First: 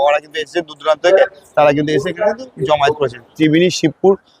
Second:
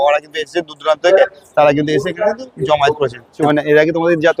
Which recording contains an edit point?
first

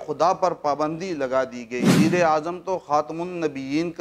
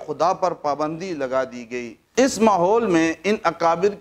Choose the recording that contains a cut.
first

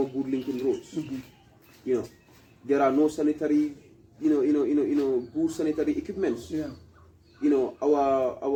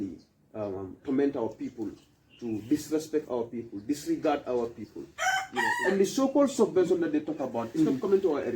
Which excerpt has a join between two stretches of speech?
second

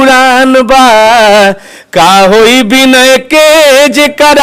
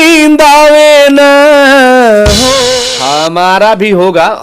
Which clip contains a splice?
second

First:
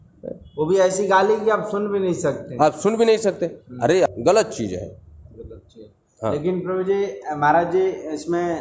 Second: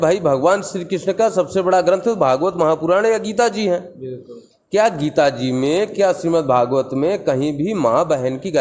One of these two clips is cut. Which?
first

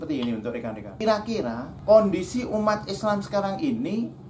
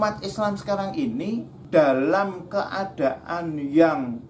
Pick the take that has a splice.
first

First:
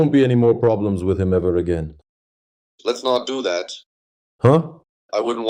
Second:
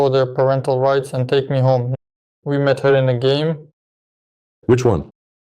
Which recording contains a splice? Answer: second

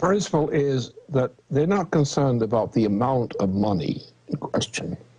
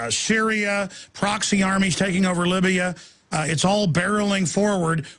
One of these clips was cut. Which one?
first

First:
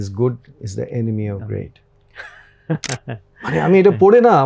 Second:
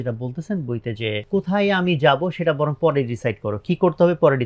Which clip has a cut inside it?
second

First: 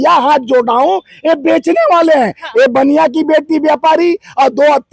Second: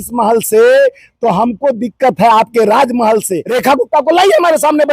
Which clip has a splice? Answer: second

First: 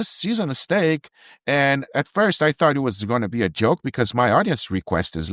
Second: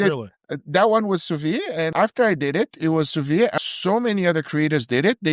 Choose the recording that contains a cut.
second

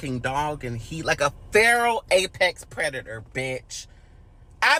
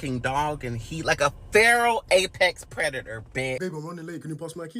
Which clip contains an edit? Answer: second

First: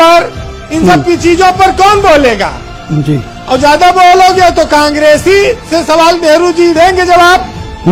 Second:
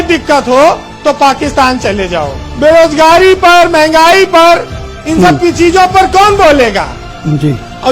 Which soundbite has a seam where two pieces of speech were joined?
second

